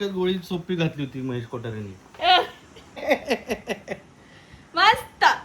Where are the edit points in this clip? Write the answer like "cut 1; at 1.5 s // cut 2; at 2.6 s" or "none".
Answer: cut 1; at 3.0 s